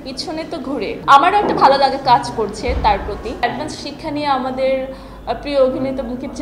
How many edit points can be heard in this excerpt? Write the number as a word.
two